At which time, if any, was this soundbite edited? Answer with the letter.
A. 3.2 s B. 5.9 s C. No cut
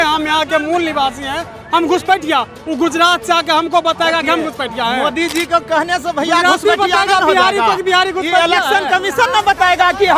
C